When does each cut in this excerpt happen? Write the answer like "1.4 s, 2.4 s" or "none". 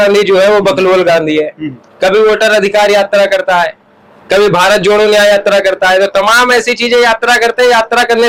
none